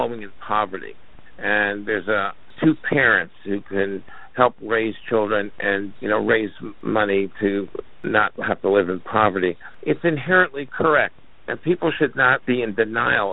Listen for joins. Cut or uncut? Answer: cut